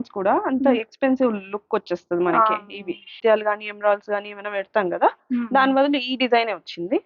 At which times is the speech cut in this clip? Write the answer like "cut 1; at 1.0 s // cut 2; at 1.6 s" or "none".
cut 1; at 3.1 s